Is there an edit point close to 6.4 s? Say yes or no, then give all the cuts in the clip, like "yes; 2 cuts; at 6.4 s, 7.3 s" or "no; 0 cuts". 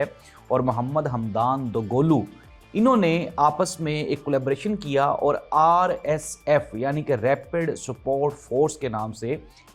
no; 0 cuts